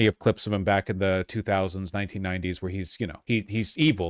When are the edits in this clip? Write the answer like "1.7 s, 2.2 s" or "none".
3.2 s